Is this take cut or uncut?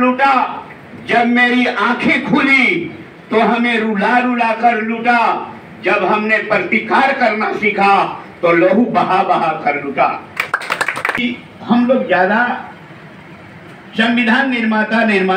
cut